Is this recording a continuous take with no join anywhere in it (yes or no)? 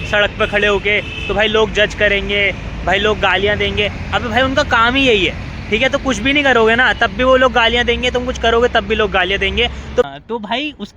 no